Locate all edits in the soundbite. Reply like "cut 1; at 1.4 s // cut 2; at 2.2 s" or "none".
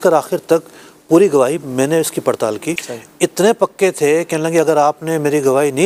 cut 1; at 2.8 s